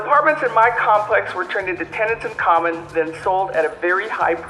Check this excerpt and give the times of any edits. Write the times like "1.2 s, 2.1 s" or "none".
none